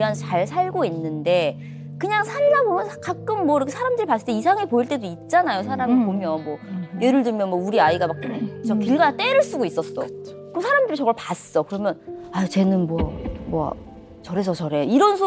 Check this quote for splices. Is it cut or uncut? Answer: uncut